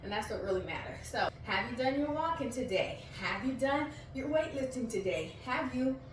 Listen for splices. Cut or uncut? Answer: cut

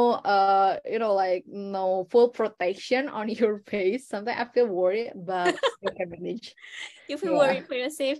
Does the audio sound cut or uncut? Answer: uncut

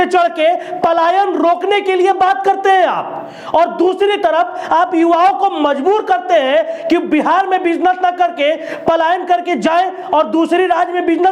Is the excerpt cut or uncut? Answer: uncut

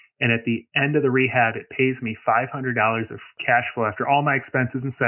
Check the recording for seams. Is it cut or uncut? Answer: cut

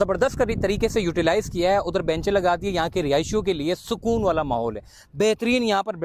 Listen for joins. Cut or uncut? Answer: uncut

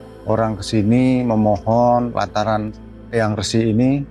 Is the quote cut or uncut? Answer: cut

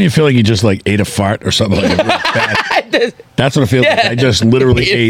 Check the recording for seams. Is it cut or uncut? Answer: uncut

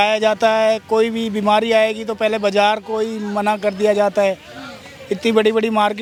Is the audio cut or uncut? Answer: uncut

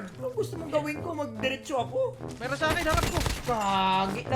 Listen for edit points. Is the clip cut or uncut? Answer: cut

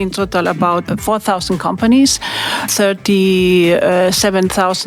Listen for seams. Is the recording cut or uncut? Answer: cut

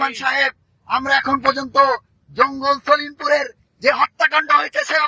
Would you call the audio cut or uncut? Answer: uncut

